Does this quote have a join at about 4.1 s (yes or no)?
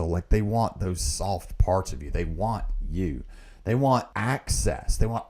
yes